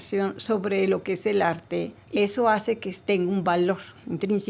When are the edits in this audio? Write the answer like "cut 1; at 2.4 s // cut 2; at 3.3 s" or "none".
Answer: cut 1; at 2.0 s